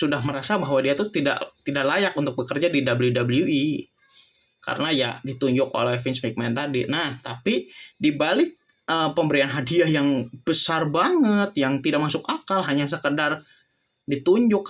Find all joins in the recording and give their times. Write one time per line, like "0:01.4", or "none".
none